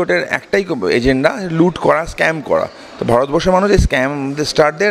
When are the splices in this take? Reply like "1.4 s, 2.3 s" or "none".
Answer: none